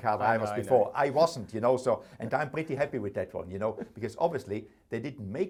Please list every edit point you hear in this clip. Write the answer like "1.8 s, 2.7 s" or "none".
none